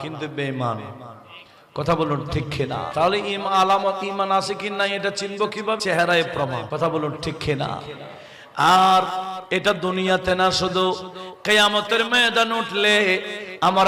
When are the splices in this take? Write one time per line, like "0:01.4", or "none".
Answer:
0:02.9
0:05.8
0:06.7